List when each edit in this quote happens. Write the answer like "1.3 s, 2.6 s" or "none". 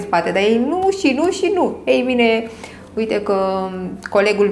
none